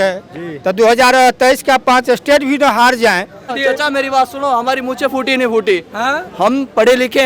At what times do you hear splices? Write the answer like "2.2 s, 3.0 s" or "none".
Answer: 3.5 s